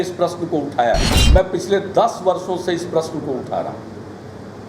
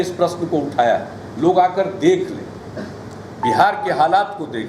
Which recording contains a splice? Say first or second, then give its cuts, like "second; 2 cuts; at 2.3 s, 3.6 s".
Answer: first; 1 cut; at 1.1 s